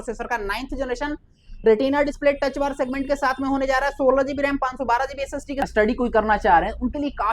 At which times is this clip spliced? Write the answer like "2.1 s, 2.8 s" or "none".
5.6 s

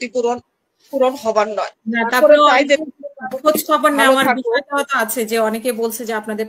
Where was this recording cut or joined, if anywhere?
none

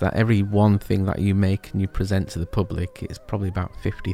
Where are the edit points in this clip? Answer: none

